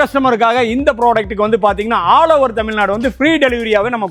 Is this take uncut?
yes; 0 cuts

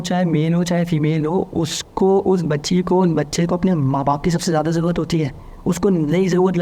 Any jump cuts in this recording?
no; 0 cuts

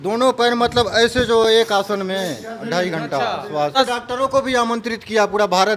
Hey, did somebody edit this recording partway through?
yes; 1 cut; at 3.8 s

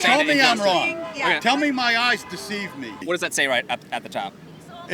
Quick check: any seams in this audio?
yes; 1 cut; at 3.0 s

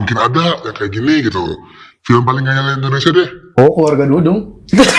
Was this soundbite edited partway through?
no; 0 cuts

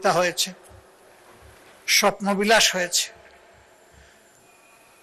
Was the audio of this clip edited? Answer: no; 0 cuts

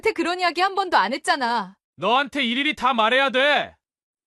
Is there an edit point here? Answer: yes; 1 cut; at 1.8 s

